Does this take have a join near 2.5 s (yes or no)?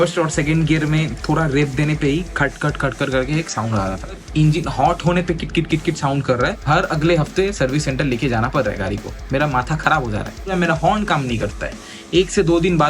no